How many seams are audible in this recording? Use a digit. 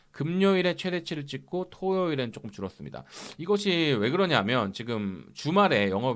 0